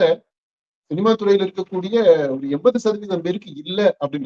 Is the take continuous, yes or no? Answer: yes